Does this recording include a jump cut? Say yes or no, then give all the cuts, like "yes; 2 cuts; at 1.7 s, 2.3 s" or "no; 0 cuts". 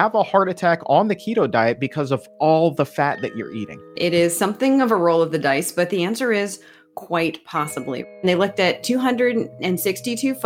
yes; 2 cuts; at 4.0 s, 8.2 s